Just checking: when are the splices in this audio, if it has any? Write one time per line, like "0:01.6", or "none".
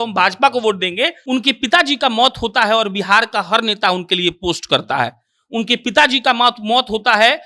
0:01.2